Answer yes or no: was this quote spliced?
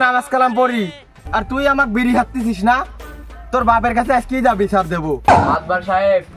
yes